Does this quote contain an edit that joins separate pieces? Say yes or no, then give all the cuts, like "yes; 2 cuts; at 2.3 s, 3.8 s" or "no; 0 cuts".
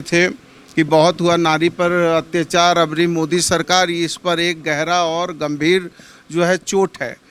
no; 0 cuts